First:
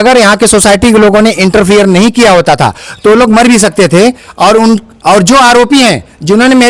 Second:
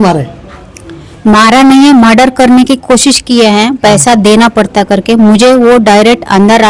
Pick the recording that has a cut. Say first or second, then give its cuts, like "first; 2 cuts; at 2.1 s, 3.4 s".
first; 1 cut; at 4.3 s